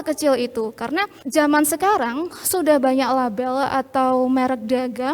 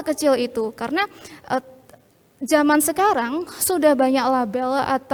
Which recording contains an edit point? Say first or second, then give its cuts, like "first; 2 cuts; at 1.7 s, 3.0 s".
first; 1 cut; at 1.2 s